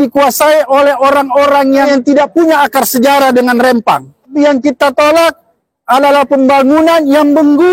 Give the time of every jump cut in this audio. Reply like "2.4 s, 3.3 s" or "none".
1.9 s, 4.3 s